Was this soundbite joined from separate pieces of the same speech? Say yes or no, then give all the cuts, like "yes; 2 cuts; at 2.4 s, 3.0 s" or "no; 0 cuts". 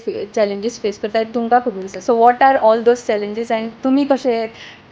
no; 0 cuts